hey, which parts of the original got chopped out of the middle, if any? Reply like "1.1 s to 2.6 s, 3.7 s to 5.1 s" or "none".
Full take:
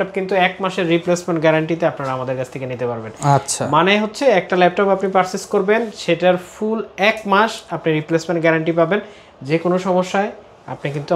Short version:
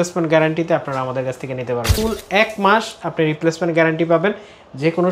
3.0 s to 6.6 s